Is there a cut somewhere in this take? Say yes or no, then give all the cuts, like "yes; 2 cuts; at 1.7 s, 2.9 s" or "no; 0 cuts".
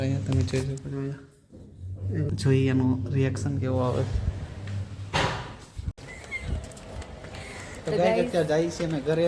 yes; 2 cuts; at 2.3 s, 6.0 s